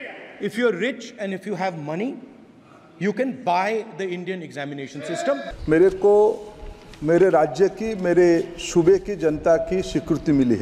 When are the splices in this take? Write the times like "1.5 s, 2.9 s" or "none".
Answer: 5.5 s